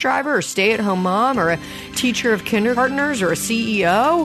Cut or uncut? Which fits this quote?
cut